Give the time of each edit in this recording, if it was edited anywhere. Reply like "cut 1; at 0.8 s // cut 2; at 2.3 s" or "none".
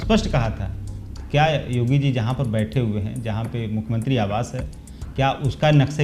none